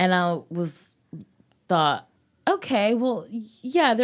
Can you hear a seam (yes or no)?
yes